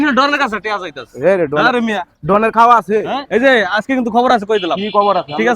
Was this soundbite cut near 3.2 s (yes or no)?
yes